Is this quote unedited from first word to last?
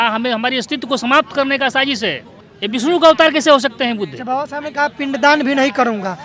yes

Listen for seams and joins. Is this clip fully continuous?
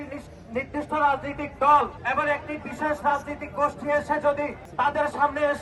no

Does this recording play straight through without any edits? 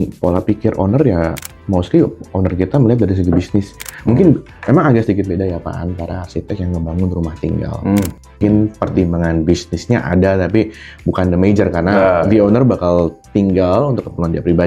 yes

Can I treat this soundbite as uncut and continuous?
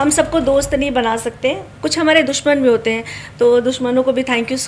yes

